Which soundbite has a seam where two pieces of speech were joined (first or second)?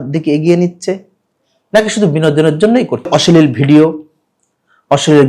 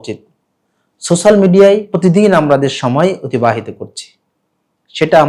first